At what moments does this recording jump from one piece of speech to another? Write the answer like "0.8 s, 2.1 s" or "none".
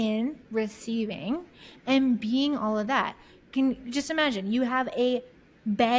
none

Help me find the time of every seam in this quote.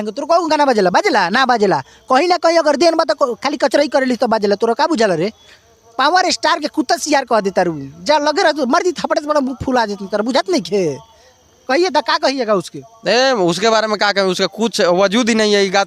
none

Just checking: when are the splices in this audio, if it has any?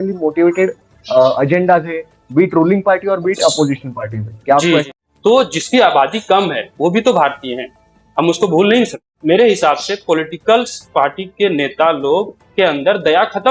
4.8 s, 9.1 s

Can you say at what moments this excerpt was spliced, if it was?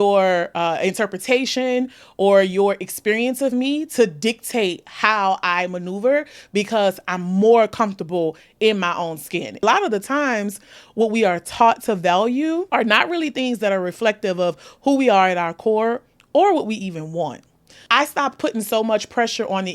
9.6 s, 12.7 s, 17.7 s

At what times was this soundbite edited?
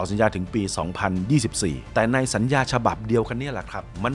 1.8 s

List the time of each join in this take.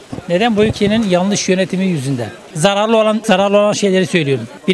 2.5 s

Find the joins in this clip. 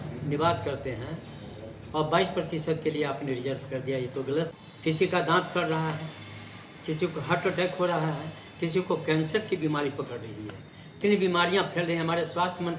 4.6 s, 11.0 s

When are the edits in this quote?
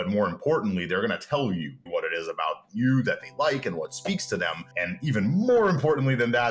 1.8 s, 4.7 s

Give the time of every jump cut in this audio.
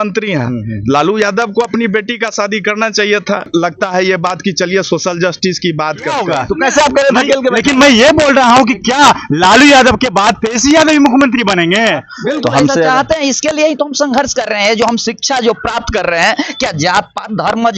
3.5 s, 6.3 s, 12.1 s

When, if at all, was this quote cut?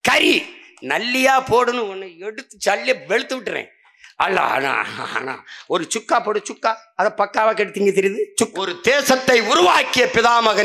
8.5 s

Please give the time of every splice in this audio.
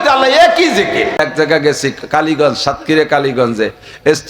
1.2 s

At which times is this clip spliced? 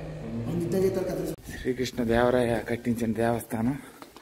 1.5 s

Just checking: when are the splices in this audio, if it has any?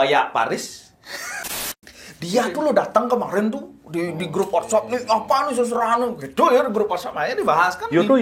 1.9 s

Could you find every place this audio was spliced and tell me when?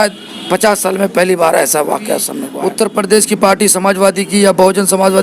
2.4 s

